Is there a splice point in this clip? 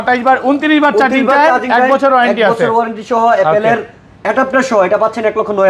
no; 0 cuts

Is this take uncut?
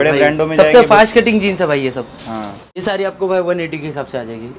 no; 1 cut; at 2.7 s

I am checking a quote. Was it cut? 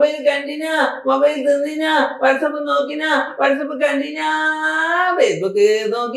no; 0 cuts

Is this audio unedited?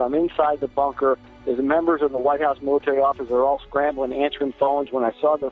yes; 0 cuts

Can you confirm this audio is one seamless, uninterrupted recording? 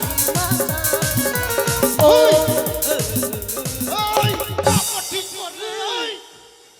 yes; 0 cuts

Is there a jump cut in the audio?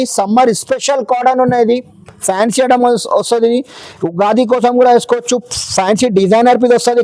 no; 0 cuts

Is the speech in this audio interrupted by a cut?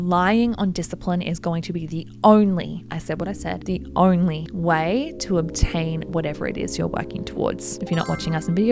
yes; 1 cut; at 7.8 s

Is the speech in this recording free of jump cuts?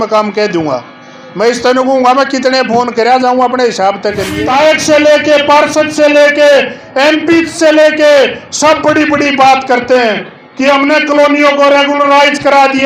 no; 1 cut; at 4.3 s

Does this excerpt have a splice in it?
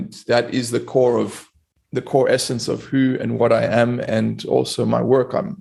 no; 0 cuts

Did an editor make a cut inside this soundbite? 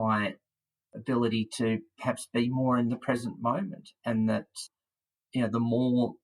yes; 1 cut; at 4.6 s

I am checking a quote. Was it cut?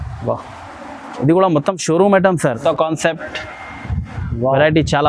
yes; 1 cut; at 2.6 s

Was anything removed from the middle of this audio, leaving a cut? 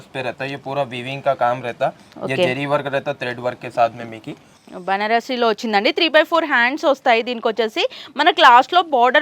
no; 0 cuts

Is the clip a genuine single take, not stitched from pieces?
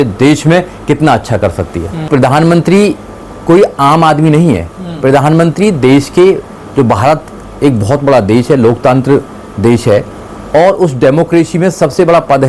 no; 1 cut; at 2.1 s

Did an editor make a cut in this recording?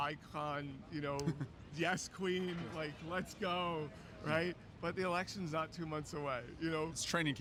no; 0 cuts

